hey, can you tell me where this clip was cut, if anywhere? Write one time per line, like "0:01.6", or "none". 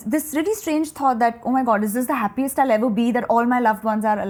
none